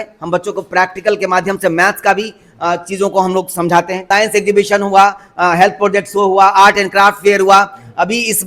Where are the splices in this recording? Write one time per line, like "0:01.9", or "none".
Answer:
0:04.0